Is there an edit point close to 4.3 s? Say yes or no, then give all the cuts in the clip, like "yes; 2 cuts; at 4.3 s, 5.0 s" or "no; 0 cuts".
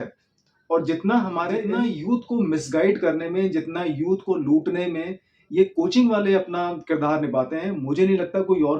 no; 1 cut; at 1.7 s